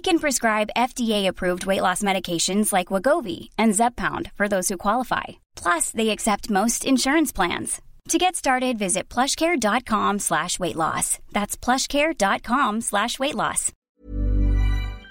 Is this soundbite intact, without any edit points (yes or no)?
no